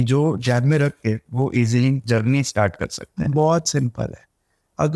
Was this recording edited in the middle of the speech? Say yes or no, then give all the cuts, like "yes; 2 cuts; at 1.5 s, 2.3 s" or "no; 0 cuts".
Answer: no; 0 cuts